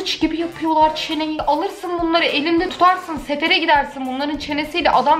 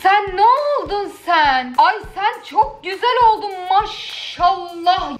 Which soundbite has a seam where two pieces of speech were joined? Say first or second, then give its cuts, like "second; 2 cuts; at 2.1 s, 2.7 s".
first; 1 cut; at 1.3 s